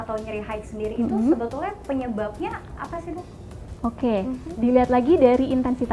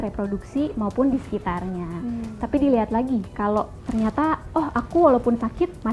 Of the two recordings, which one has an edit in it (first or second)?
first